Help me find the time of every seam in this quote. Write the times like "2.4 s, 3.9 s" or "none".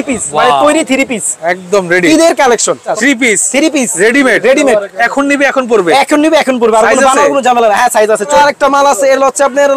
2.9 s, 8.3 s